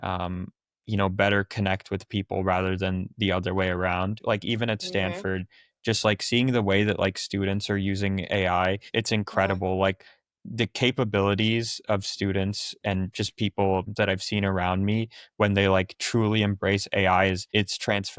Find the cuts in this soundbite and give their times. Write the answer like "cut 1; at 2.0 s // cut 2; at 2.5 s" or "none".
cut 1; at 4.2 s // cut 2; at 8.8 s